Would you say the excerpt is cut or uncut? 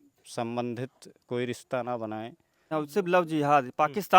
cut